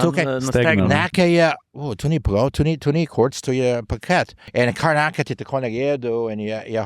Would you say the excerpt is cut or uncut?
cut